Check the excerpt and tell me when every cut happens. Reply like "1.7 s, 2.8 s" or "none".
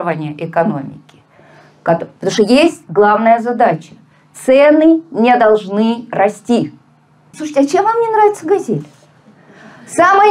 7.4 s